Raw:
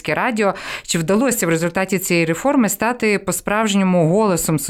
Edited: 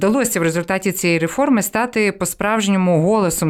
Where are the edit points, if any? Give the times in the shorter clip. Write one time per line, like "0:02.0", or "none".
none